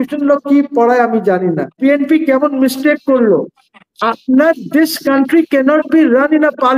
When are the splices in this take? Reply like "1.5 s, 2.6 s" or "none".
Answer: 1.7 s